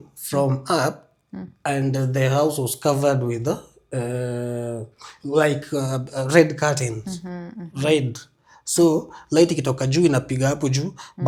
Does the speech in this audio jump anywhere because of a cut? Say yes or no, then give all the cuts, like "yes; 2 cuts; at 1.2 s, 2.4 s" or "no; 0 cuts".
no; 0 cuts